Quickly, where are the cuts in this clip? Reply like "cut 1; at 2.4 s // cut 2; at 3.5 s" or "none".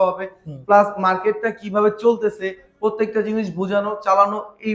none

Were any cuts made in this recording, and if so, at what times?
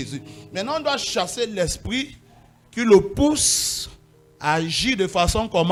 none

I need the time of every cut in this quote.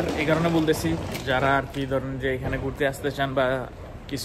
none

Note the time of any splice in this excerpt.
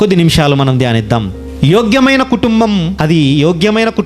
cut 1; at 2.9 s

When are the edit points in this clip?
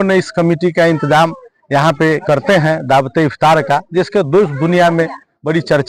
none

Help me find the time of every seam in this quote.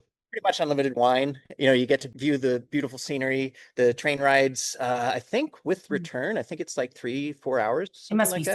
cut 1; at 2.1 s

